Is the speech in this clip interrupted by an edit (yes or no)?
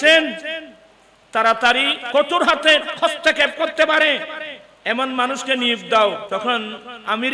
yes